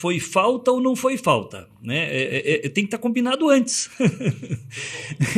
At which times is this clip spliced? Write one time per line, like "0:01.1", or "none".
none